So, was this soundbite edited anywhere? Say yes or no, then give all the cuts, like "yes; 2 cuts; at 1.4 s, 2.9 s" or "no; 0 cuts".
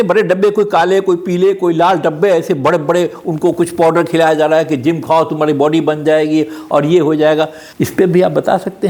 no; 0 cuts